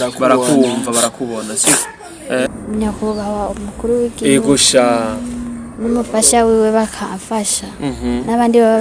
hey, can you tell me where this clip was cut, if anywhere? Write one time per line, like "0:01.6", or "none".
0:02.5

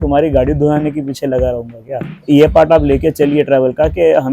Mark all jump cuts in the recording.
0:02.2

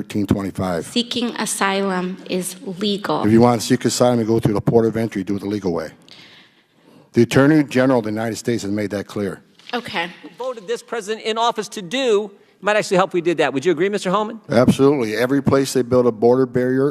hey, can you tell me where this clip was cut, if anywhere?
0:10.5

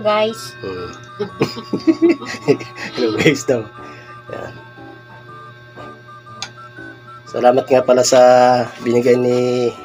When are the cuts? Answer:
none

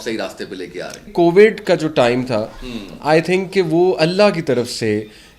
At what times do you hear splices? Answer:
0:01.1

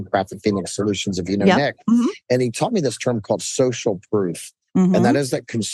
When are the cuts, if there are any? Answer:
none

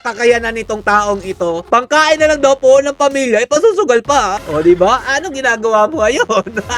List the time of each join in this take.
0:01.6
0:04.4

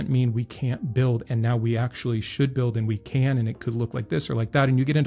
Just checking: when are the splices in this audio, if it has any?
none

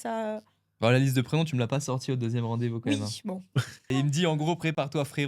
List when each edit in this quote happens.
0:03.8

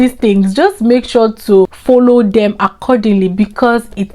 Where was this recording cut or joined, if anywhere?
0:01.8

